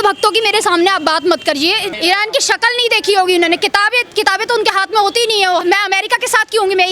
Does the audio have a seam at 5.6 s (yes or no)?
yes